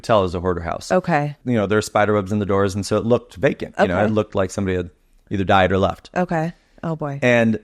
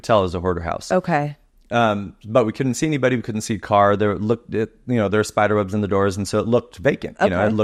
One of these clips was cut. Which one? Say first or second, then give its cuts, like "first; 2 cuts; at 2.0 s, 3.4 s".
first; 1 cut; at 1.4 s